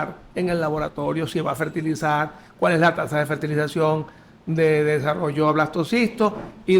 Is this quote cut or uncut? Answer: uncut